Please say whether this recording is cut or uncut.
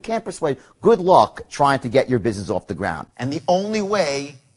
cut